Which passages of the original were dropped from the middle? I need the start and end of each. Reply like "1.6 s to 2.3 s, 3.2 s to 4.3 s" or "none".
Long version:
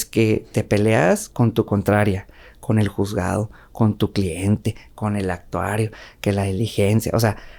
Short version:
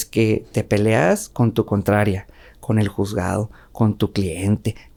none